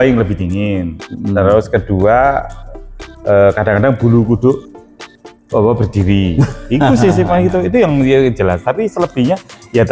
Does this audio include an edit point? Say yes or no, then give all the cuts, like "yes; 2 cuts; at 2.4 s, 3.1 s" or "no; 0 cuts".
no; 0 cuts